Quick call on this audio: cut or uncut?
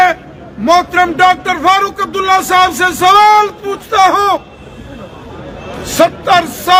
uncut